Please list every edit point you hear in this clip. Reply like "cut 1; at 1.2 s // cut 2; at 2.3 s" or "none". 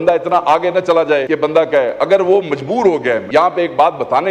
cut 1; at 1.3 s // cut 2; at 3.2 s